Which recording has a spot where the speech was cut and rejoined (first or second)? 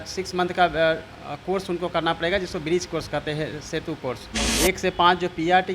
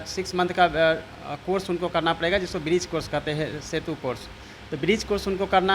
first